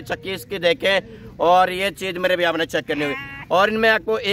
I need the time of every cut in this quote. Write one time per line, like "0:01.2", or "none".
none